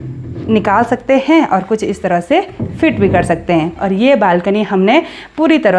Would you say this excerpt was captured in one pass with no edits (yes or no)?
no